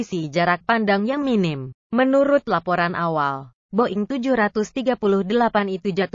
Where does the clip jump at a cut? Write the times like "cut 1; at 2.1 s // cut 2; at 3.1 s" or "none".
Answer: cut 1; at 1.3 s